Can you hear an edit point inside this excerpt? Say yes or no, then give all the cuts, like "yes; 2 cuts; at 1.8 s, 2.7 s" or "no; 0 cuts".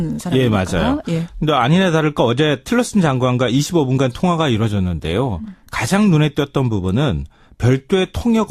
no; 0 cuts